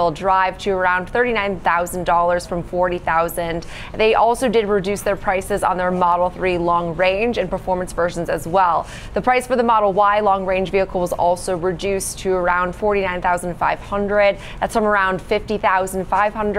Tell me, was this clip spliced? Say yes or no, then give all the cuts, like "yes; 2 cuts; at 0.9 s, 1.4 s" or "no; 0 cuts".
no; 0 cuts